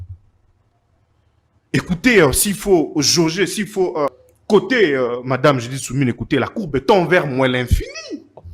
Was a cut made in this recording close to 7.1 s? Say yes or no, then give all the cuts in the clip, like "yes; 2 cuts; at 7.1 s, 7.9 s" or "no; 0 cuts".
no; 1 cut; at 4.3 s